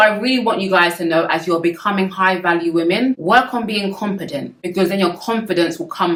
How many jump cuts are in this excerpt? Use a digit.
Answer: 0